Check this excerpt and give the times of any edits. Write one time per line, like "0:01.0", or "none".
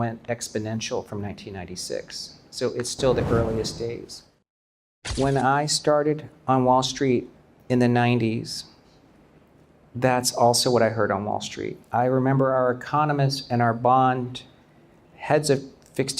0:04.8